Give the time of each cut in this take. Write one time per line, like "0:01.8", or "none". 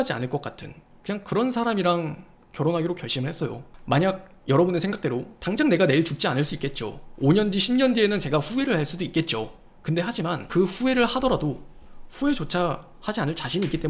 0:10.5